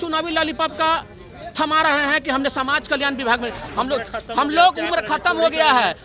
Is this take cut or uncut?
cut